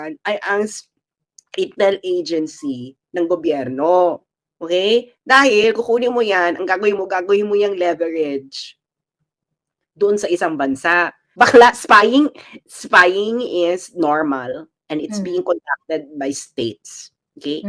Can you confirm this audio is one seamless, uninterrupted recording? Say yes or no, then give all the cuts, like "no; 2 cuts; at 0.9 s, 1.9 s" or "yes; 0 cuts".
no; 1 cut; at 11.2 s